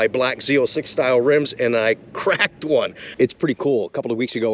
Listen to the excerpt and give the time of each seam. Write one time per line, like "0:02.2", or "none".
0:03.0